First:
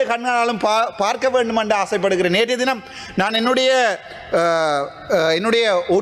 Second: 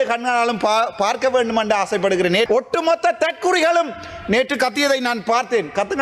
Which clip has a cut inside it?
second; 1 cut; at 2.5 s

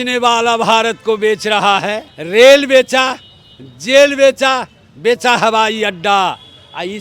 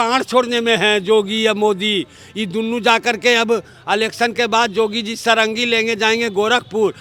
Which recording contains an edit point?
first; 1 cut; at 2.1 s

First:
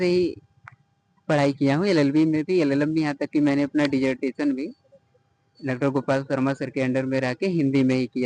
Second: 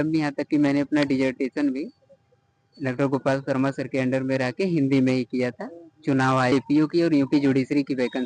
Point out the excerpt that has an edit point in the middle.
second; 1 cut; at 6.5 s

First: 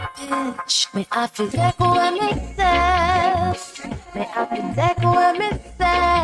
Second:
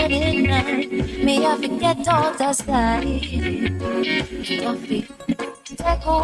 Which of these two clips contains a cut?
first; 1 cut; at 4.6 s

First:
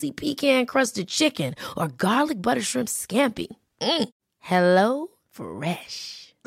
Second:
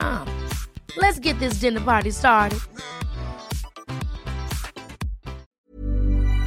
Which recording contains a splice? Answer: second; 1 cut; at 5.5 s

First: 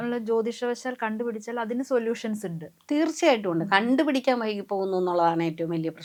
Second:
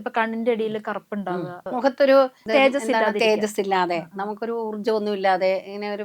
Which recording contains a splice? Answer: second; 2 cuts; at 1.7 s, 2.4 s

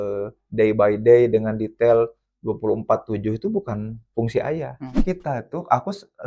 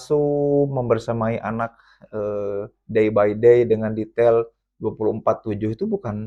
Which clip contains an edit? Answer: first; 1 cut; at 4.9 s

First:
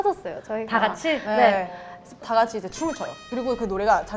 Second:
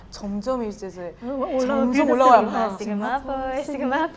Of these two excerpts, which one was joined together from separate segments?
first; 2 cuts; at 2.2 s, 3.3 s

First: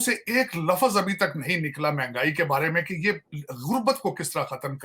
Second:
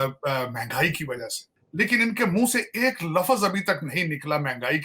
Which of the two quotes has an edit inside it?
second; 1 cut; at 1.5 s

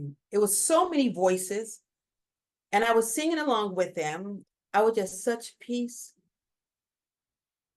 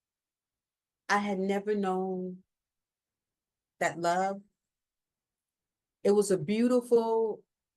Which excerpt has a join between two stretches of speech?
first; 1 cut; at 4.3 s

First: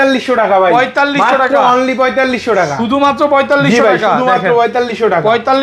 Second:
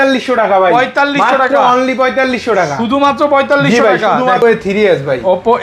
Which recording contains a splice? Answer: second; 1 cut; at 4.4 s

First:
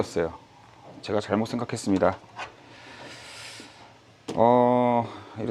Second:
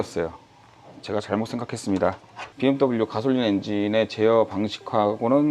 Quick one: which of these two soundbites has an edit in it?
second; 1 cut; at 2.5 s

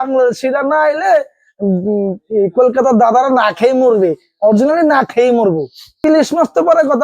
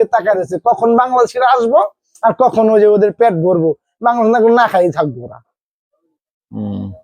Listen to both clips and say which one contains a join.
first; 1 cut; at 6.0 s

